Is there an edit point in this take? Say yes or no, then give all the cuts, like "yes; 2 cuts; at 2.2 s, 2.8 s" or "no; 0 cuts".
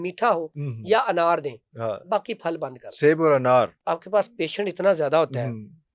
yes; 1 cut; at 3.8 s